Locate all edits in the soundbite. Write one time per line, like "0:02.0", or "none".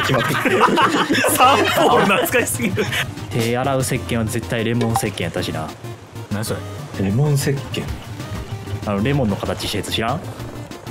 0:03.0